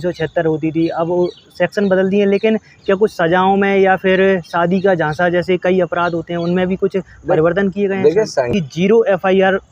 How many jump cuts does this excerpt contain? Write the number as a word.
one